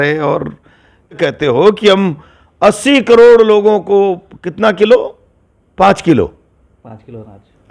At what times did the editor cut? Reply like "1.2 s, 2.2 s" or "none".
1.2 s